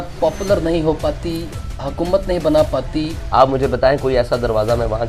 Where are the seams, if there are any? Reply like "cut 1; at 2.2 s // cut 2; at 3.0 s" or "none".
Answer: cut 1; at 3.2 s